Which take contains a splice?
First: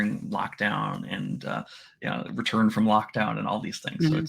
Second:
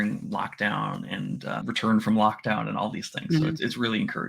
second; 1 cut; at 1.6 s

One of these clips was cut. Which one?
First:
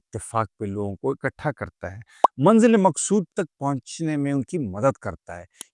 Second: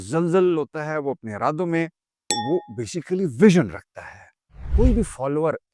second; 2 cuts; at 2.4 s, 4.7 s

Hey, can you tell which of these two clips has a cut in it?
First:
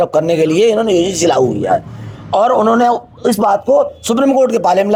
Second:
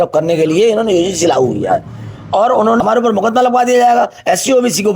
second; 1 cut; at 2.8 s

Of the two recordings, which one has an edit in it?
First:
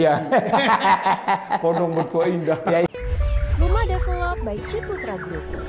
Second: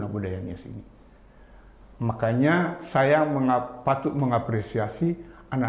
first; 1 cut; at 2.9 s

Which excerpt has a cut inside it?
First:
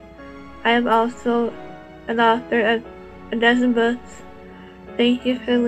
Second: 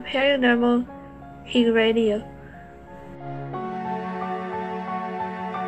first; 1 cut; at 1.2 s

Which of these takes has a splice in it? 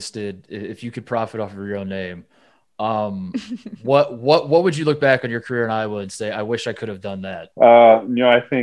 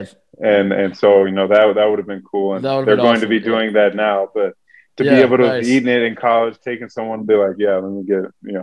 first; 1 cut; at 7.4 s

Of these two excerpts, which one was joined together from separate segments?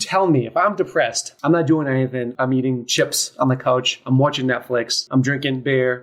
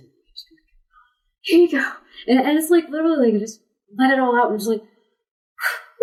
first; 3 cuts; at 1.3 s, 2.3 s, 5.0 s

